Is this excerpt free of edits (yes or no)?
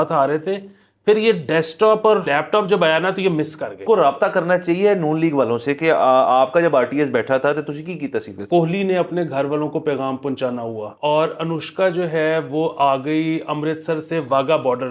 no